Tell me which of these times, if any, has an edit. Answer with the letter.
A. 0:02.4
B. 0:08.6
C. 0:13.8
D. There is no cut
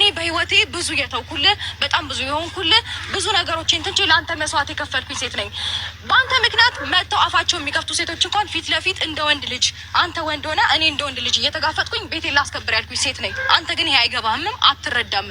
C